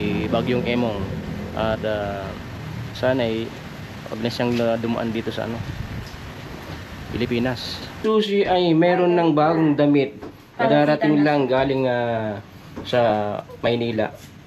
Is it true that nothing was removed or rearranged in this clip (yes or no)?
no